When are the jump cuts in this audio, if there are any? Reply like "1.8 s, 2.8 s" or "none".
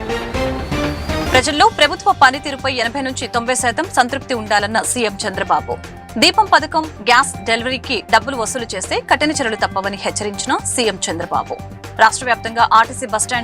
1.2 s